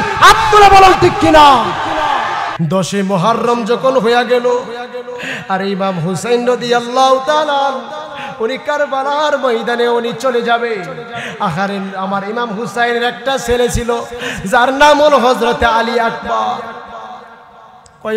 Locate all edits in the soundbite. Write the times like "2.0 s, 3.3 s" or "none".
2.5 s